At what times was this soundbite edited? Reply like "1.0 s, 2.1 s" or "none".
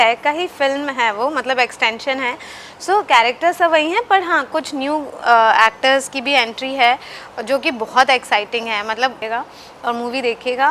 9.2 s